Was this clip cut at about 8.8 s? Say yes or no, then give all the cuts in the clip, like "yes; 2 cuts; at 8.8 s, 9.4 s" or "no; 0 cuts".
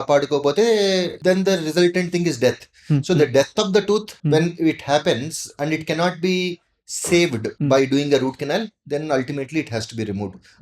no; 3 cuts; at 1.1 s, 4.1 s, 7.5 s